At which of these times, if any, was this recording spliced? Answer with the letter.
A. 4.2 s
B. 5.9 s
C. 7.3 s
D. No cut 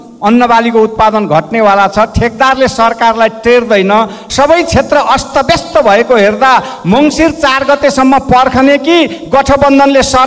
A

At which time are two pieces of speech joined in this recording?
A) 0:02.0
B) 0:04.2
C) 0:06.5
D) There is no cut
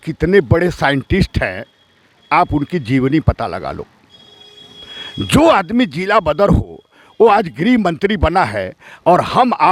D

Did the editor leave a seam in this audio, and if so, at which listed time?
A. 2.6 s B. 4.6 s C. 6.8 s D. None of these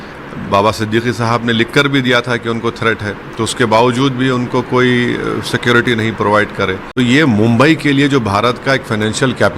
C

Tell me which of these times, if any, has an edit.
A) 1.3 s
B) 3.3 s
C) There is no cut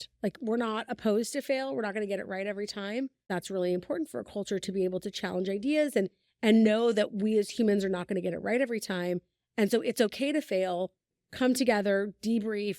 B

